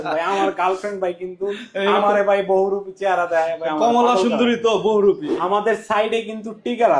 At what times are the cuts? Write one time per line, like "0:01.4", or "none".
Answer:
0:05.3